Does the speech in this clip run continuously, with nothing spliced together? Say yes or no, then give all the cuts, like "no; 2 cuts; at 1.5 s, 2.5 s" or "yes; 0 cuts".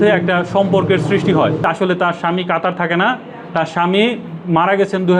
no; 1 cut; at 1.6 s